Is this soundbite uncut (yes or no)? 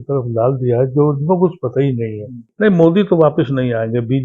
no